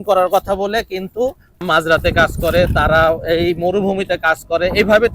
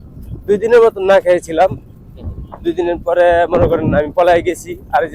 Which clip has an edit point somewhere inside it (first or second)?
first